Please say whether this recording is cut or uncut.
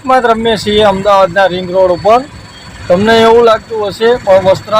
uncut